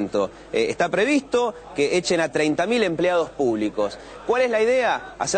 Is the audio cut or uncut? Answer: uncut